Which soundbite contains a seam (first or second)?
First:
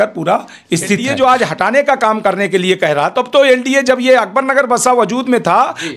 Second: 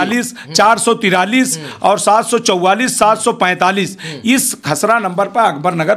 first